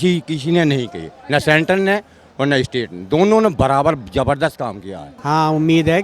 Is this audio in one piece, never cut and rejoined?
no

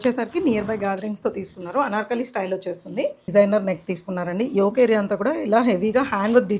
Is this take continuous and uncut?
no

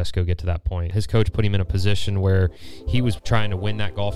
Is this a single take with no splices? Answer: no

